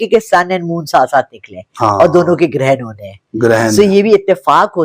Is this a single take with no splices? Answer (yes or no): yes